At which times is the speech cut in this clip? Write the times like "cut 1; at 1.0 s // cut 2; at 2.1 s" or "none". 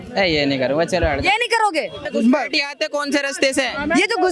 cut 1; at 2.1 s